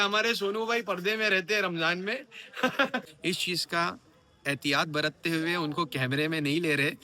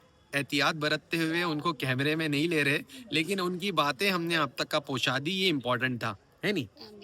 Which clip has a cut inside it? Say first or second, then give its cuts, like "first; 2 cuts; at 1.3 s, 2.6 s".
first; 1 cut; at 3.1 s